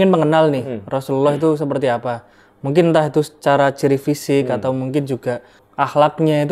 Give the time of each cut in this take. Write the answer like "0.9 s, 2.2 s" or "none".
5.6 s